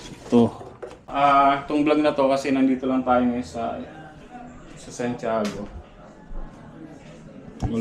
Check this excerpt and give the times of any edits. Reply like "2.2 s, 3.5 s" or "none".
1.0 s